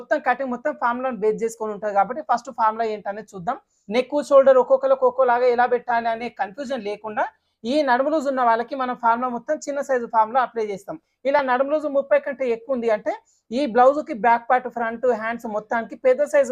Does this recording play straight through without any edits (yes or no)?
no